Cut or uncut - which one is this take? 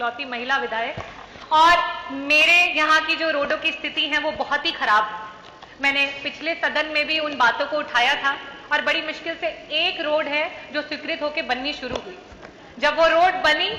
uncut